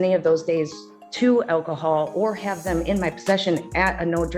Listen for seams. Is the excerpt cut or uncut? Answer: uncut